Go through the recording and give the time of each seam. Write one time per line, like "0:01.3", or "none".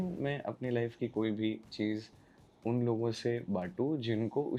none